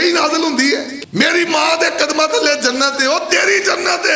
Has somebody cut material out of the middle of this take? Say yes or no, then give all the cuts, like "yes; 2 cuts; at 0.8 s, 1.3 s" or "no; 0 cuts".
yes; 1 cut; at 0.9 s